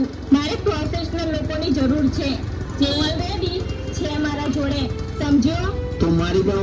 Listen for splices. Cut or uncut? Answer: uncut